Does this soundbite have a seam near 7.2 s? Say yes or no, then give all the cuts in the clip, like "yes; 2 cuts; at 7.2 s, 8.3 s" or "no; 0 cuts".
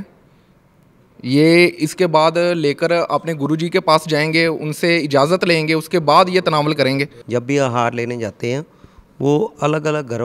yes; 1 cut; at 7.2 s